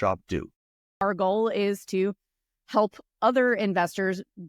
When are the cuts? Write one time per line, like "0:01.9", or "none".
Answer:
0:01.0